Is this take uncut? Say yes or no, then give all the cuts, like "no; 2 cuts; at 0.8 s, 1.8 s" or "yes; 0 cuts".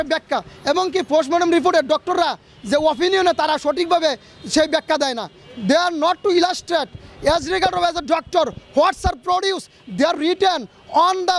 yes; 0 cuts